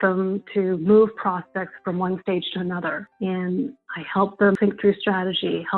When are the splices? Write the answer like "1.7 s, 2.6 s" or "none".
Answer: 3.1 s, 4.6 s